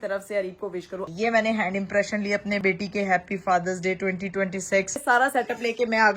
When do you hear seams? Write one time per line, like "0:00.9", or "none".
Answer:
0:01.0
0:02.6
0:05.0

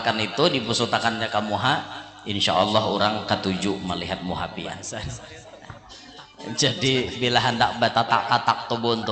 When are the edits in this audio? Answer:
0:05.3

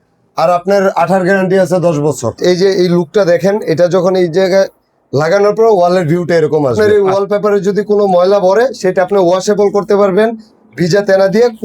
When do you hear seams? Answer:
0:02.4
0:06.9

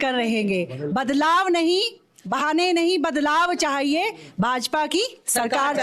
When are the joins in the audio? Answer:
none

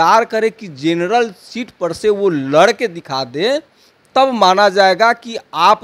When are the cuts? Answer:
none

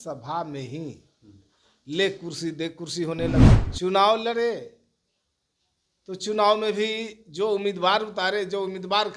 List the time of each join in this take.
0:03.6

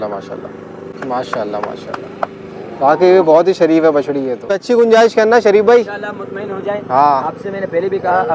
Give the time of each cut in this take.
0:01.0
0:04.3

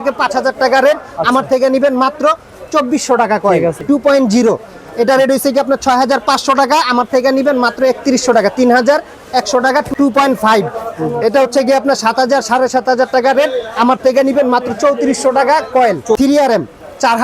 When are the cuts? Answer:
0:03.8
0:09.9
0:16.2

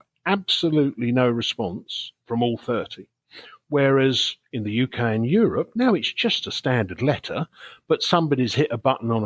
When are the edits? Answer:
none

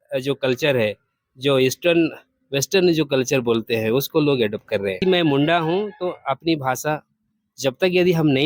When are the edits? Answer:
0:05.0

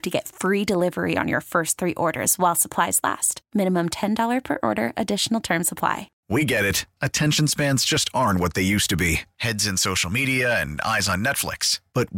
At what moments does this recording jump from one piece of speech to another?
0:06.1

